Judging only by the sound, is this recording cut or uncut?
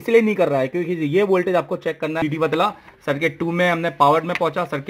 cut